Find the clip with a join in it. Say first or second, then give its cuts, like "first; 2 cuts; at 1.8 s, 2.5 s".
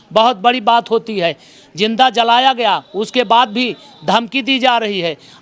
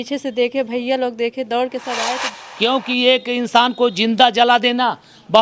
second; 1 cut; at 2.3 s